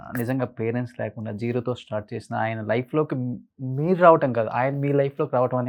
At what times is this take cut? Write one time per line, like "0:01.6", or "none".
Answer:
none